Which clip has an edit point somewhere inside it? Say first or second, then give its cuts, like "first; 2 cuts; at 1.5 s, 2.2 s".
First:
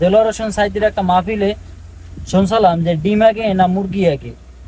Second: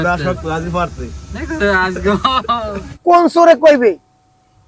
second; 1 cut; at 2.8 s